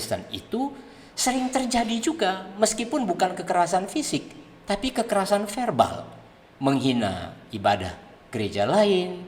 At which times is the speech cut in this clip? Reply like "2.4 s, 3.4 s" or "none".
none

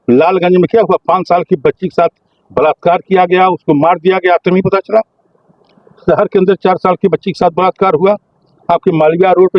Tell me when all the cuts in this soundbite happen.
none

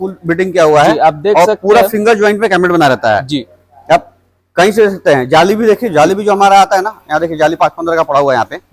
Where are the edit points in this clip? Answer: none

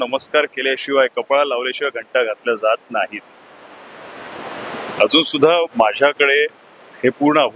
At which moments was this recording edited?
none

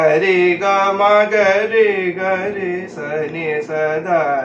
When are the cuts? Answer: none

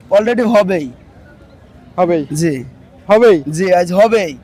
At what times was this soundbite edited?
none

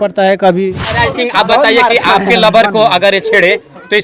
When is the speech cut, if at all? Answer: 1.0 s

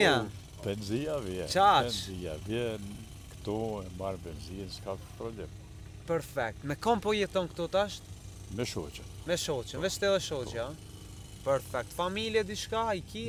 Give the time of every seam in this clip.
none

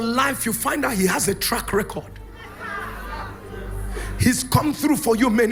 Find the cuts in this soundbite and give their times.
none

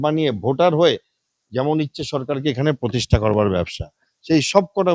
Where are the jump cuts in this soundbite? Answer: none

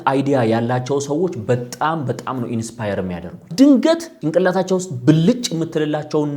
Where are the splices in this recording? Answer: 3.5 s, 4.1 s

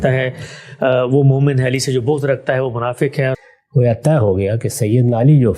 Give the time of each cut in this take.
3.5 s

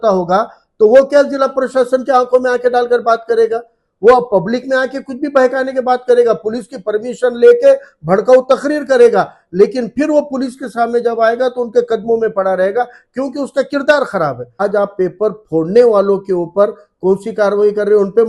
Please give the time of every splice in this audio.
14.6 s

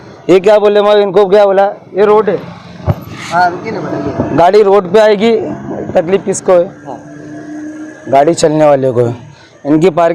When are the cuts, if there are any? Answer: none

